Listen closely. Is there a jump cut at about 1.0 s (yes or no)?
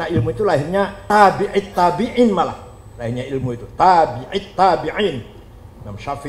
yes